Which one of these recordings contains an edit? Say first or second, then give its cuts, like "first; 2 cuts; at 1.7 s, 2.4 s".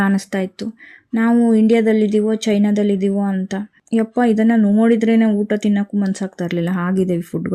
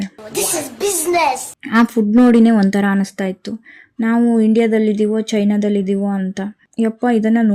second; 1 cut; at 1.5 s